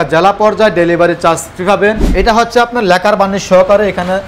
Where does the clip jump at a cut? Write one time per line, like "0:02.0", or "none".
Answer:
0:02.1